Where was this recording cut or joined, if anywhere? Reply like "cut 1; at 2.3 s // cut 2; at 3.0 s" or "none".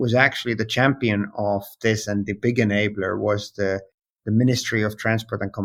none